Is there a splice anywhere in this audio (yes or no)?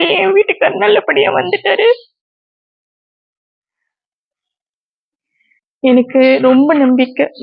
no